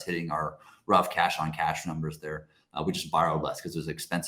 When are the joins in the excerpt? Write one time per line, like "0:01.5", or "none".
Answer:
none